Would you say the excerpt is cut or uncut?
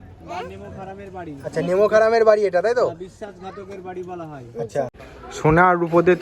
cut